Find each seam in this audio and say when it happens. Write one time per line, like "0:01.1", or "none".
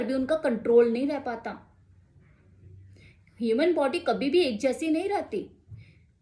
none